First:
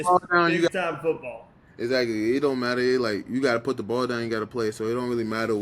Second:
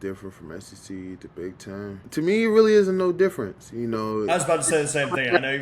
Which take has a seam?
second; 1 cut; at 2.0 s

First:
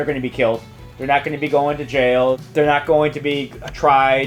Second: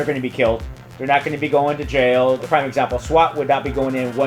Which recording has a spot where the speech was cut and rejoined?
second; 1 cut; at 2.4 s

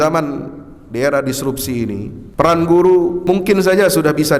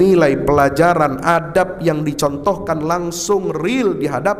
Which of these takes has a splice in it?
first; 2 cuts; at 2.2 s, 3.2 s

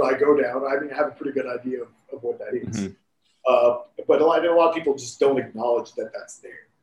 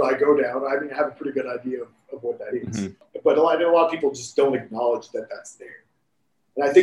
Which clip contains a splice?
second; 1 cut; at 3.1 s

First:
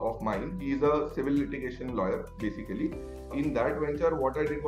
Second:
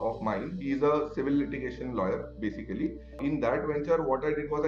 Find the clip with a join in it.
second; 1 cut; at 3.1 s

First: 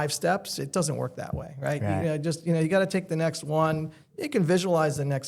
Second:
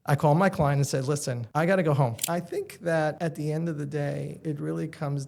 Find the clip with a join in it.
second; 4 cuts; at 1.4 s, 2.2 s, 3.2 s, 4.4 s

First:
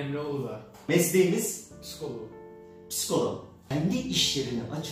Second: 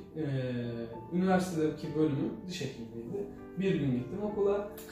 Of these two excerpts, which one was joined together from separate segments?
first; 2 cuts; at 0.8 s, 3.6 s

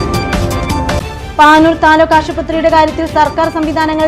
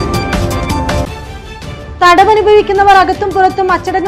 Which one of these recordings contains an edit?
first; 1 cut; at 1.0 s

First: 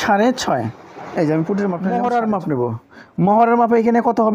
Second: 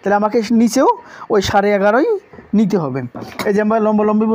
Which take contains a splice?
first; 1 cut; at 1.9 s

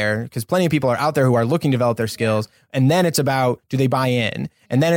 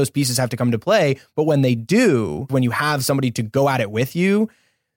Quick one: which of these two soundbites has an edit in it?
second; 1 cut; at 2.5 s

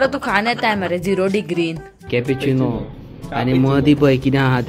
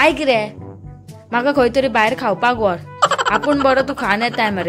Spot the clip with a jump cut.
first; 1 cut; at 1.9 s

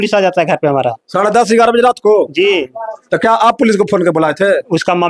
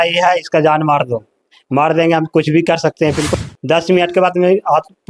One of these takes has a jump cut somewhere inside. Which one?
second; 1 cut; at 3.3 s

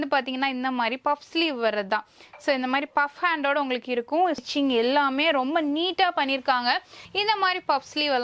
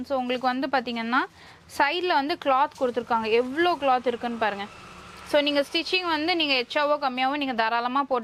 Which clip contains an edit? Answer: first; 2 cuts; at 4.4 s, 7.0 s

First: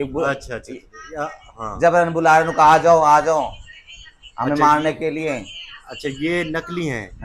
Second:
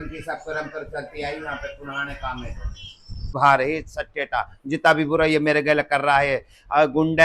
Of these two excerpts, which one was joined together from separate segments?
second; 1 cut; at 3.3 s

